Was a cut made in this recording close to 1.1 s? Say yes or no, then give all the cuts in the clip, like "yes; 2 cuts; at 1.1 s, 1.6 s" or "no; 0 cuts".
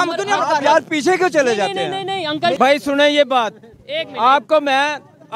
no; 1 cut; at 2.5 s